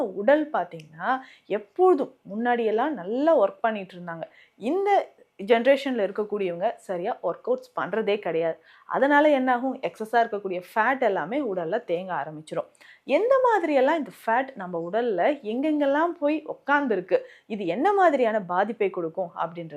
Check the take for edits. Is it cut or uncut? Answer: uncut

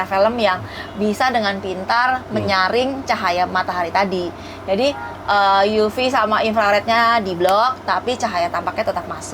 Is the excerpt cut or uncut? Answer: uncut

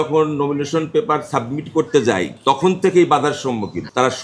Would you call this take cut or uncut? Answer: uncut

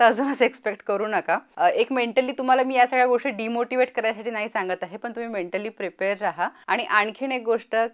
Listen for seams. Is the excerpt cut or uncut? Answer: cut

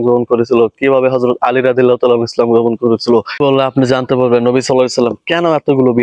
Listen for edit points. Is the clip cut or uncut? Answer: cut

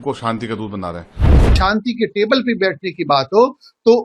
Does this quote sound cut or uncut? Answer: cut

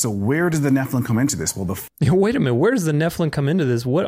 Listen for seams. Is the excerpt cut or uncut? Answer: uncut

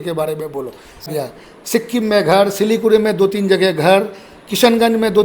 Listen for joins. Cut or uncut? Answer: cut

